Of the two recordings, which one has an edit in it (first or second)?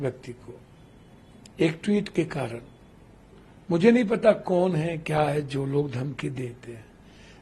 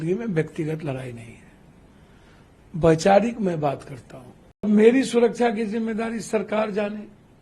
second